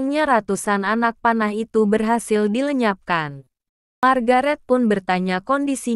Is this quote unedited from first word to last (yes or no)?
no